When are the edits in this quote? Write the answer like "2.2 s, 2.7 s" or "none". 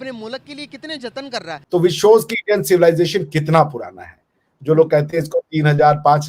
1.6 s